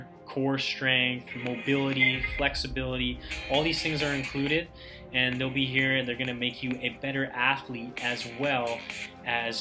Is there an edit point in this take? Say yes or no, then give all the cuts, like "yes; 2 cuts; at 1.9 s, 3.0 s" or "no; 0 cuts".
no; 0 cuts